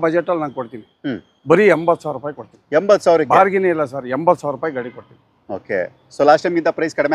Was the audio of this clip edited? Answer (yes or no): no